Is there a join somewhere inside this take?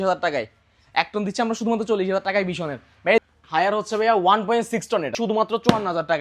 yes; 2 cuts; at 3.2 s, 5.1 s

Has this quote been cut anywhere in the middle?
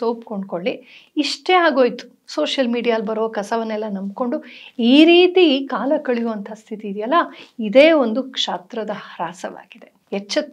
no; 0 cuts

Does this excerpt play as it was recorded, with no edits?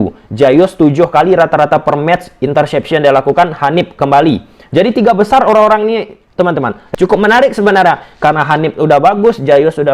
no; 1 cut; at 6.8 s

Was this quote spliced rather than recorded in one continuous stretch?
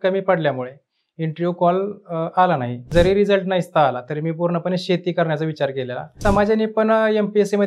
yes; 2 cuts; at 2.9 s, 6.2 s

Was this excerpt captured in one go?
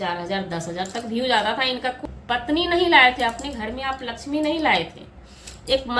no; 1 cut; at 2.0 s

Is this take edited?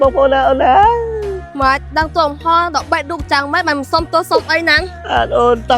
no; 0 cuts

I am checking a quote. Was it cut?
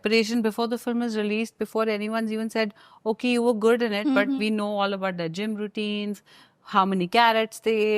no; 0 cuts

